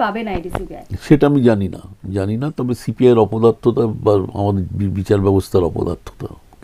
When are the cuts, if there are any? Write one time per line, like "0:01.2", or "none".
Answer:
none